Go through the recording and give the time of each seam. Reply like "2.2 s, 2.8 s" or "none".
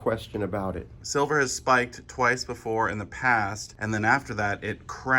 1.0 s, 3.7 s